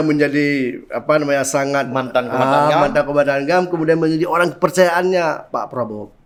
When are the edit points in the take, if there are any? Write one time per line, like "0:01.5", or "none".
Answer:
none

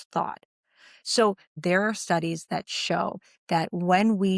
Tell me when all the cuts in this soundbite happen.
0:01.6

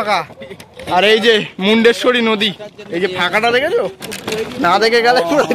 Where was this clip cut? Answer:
none

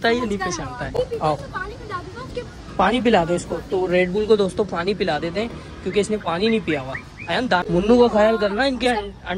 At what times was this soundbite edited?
0:00.9
0:07.6

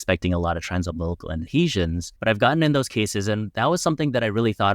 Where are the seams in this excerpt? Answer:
0:01.5
0:02.1

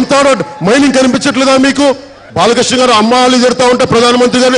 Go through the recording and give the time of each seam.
0:02.2

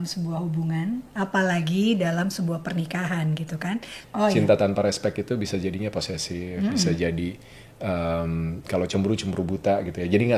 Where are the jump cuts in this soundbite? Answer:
0:04.0

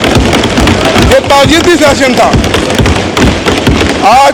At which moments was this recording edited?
none

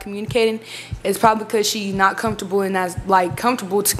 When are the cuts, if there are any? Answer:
none

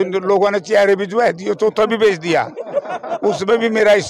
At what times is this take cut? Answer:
none

